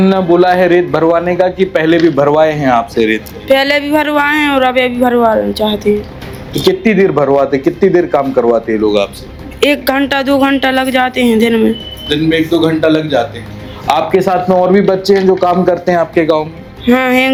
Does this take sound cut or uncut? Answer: uncut